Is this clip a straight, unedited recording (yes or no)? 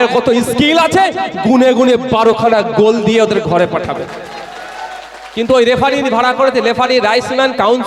yes